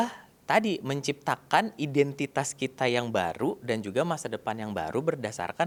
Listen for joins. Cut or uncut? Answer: uncut